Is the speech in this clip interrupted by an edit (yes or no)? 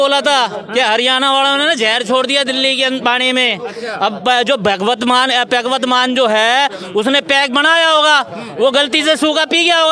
no